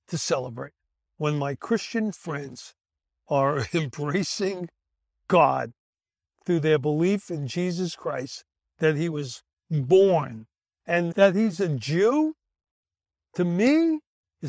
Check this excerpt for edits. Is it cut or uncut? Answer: uncut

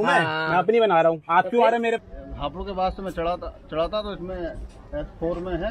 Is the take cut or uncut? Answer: cut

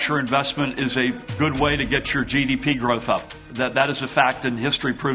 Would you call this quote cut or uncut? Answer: uncut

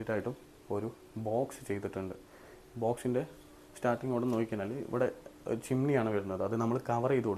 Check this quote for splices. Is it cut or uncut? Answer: uncut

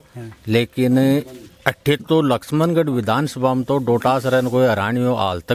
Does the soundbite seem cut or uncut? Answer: uncut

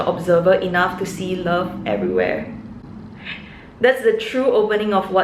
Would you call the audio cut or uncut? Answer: uncut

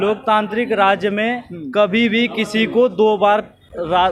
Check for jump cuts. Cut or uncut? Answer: uncut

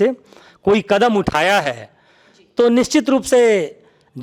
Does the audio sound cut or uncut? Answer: uncut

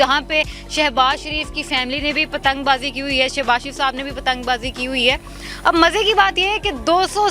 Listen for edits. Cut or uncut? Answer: uncut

